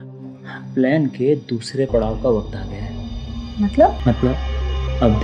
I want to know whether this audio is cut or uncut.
cut